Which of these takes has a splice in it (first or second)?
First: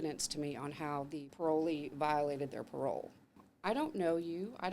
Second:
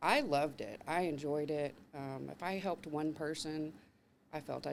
first